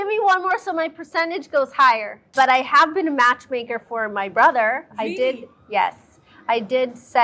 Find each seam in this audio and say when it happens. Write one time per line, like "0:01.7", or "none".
0:02.3